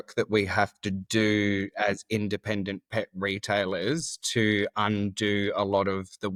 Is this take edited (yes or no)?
no